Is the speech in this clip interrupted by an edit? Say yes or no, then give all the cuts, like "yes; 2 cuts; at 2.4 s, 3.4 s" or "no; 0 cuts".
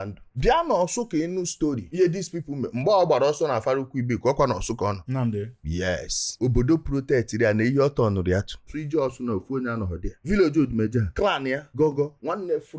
no; 0 cuts